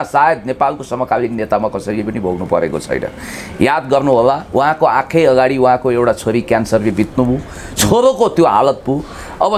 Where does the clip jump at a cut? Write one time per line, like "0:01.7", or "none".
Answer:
none